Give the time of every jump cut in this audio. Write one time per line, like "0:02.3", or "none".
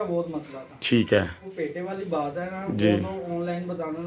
0:01.4